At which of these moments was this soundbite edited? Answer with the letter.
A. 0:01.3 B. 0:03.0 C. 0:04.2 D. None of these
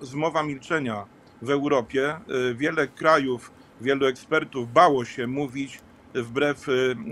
D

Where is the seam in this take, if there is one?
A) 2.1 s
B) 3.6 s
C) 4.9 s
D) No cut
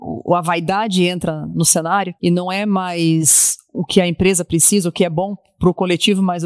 A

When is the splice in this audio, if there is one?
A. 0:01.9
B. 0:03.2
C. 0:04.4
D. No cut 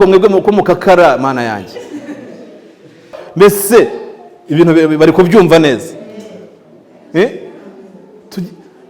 B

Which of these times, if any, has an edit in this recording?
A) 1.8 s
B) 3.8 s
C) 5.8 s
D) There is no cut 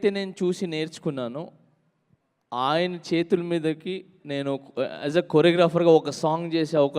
D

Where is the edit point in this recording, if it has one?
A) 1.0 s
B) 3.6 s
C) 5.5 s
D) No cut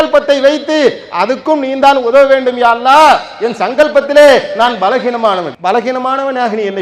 C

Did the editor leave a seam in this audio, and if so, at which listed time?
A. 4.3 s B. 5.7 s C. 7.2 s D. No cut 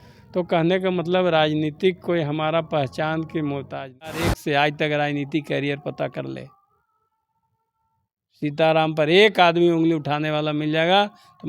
A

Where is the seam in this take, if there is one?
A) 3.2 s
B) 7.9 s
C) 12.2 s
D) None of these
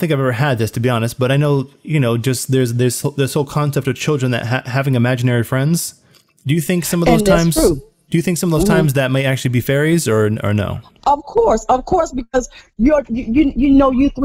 D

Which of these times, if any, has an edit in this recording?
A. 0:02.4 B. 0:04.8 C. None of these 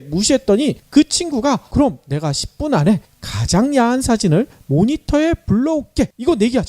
A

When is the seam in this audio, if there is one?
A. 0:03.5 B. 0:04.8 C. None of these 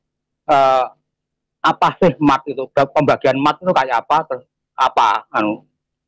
C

